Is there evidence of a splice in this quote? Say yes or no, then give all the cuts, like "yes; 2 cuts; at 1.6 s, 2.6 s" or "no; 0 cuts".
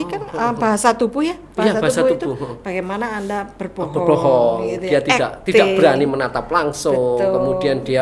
no; 0 cuts